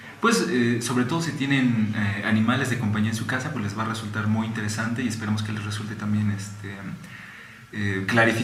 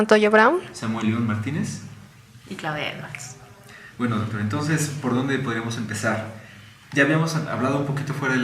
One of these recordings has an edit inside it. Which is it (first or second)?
second